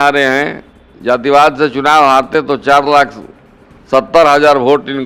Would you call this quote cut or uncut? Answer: uncut